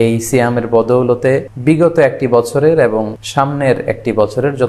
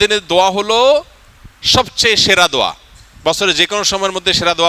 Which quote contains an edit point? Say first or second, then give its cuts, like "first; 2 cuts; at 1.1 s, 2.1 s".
first; 2 cuts; at 1.5 s, 3.2 s